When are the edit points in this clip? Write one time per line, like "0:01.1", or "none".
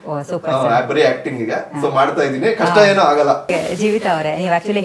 0:03.5